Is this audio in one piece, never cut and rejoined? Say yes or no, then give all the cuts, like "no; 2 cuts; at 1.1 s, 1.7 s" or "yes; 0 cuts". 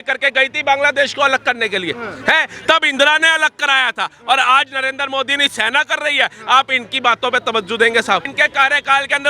no; 1 cut; at 8.3 s